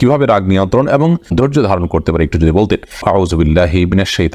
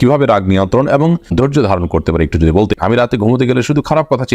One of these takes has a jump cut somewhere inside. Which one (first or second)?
second